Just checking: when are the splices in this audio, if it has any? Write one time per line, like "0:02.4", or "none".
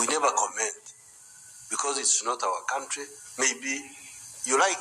0:01.5

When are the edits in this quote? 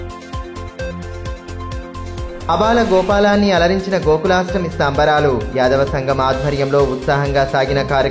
none

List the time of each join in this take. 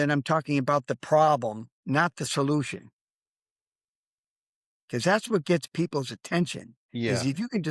none

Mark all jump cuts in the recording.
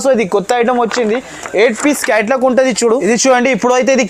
0:03.0

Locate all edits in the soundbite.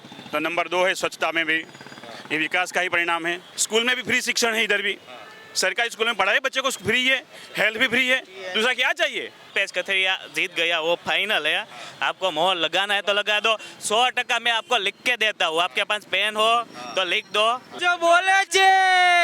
0:03.5
0:09.5
0:17.7

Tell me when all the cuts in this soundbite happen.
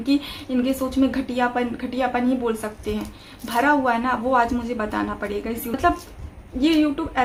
none

